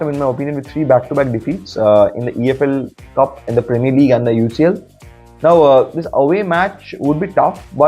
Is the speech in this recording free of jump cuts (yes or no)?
yes